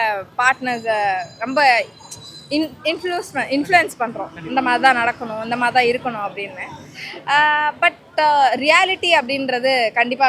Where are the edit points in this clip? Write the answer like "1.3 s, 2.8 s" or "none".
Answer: none